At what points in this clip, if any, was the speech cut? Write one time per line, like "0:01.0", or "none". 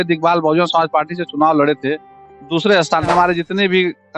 0:03.1